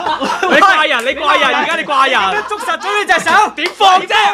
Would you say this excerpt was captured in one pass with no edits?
yes; 0 cuts

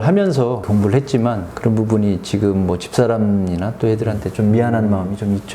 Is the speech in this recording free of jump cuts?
yes; 0 cuts

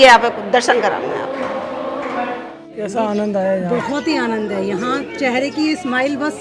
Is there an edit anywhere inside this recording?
yes; 1 cut; at 2.9 s

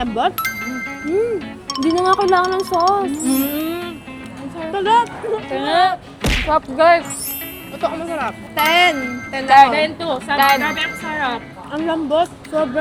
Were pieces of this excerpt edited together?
no; 0 cuts

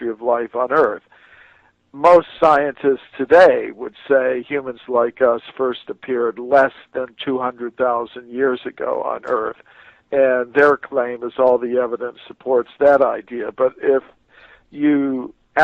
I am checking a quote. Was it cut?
no; 0 cuts

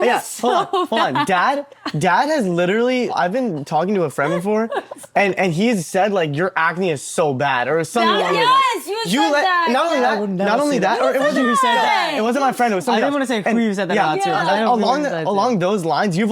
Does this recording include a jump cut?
yes; 1 cut; at 3.1 s

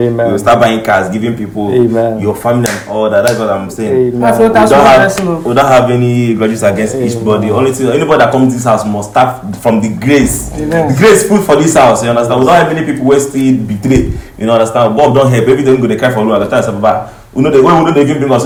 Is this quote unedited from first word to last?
yes; 0 cuts

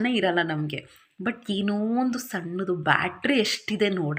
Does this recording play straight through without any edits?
yes; 0 cuts

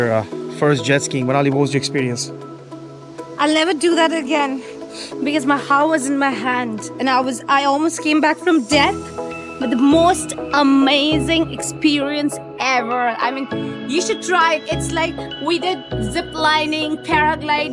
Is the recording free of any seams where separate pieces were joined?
yes; 0 cuts

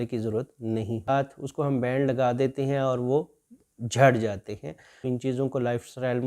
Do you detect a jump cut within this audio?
yes; 2 cuts; at 1.1 s, 4.9 s

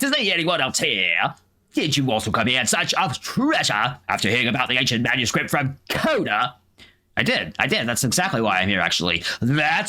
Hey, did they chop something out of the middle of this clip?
no; 0 cuts

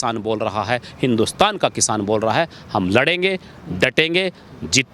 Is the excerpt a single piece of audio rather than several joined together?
yes; 0 cuts

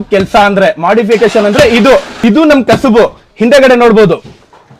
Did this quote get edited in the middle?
no; 0 cuts

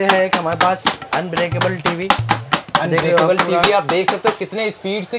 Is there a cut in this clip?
no; 0 cuts

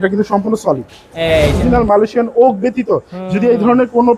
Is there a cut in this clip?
yes; 1 cut; at 1.6 s

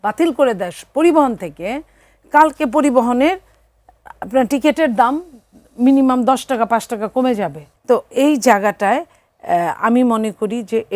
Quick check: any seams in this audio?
yes; 1 cut; at 7.7 s

